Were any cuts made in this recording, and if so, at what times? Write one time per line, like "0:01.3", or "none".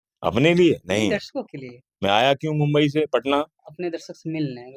none